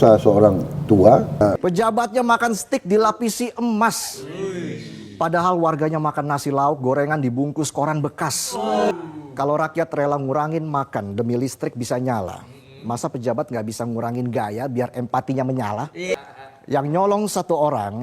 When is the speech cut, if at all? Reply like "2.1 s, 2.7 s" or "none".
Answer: 1.6 s, 8.9 s, 16.1 s